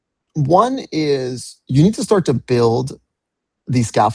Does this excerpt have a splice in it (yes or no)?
no